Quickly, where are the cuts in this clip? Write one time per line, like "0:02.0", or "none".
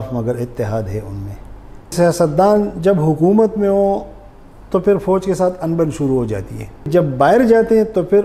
0:01.9
0:06.9